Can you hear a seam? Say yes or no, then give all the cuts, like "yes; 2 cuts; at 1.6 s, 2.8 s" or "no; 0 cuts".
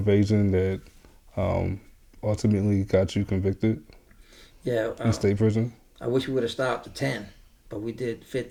no; 0 cuts